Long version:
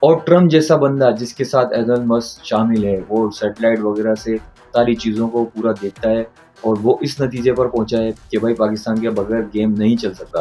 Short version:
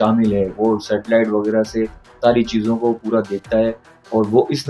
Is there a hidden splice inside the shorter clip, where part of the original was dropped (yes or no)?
no